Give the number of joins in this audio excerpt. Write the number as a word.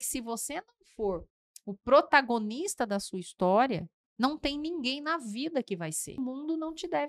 one